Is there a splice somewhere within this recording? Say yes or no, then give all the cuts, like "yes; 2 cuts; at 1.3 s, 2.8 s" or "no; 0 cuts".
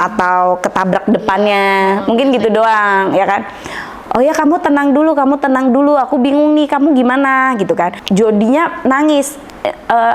yes; 1 cut; at 8.0 s